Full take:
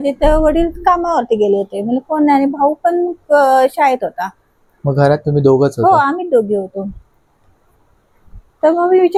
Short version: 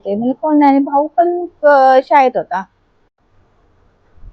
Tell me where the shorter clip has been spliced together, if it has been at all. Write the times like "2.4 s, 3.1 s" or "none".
3.0 s